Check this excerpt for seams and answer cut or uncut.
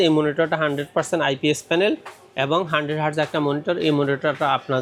uncut